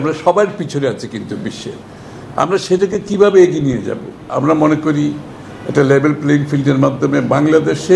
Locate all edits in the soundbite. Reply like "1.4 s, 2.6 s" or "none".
4.3 s